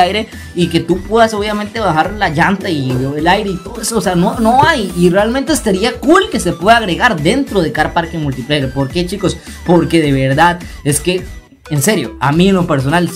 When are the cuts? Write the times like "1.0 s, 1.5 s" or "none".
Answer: none